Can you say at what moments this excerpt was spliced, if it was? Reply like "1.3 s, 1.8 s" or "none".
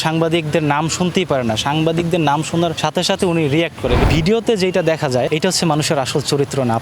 2.8 s, 4.0 s, 5.3 s